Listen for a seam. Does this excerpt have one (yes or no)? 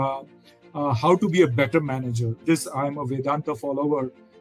yes